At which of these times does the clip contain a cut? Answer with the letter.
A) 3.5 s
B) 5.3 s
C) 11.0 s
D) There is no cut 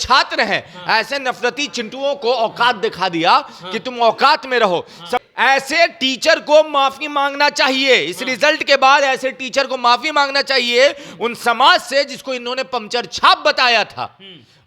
B